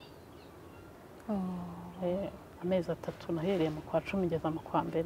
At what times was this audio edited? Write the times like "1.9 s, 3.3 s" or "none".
none